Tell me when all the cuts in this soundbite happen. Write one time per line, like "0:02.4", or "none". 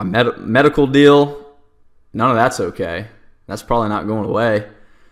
none